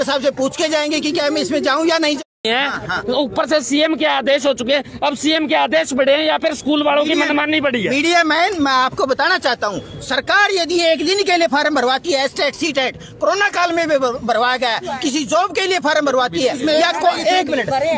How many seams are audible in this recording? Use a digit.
1